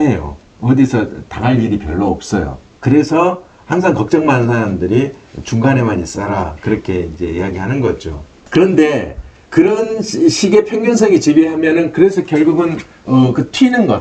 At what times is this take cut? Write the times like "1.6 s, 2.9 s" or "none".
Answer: none

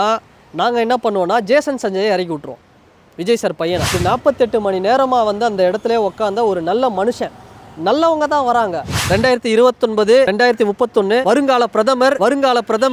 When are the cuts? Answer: 4.0 s, 9.0 s, 10.3 s, 11.2 s, 12.2 s

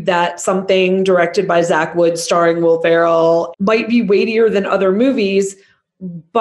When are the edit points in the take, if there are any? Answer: 3.5 s

